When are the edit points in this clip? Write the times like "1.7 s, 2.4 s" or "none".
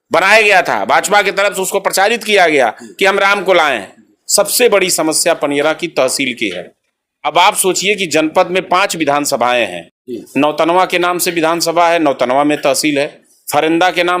4.2 s